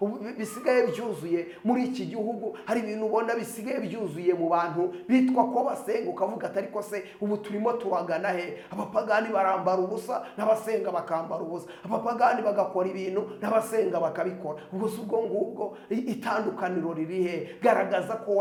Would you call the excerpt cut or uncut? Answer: uncut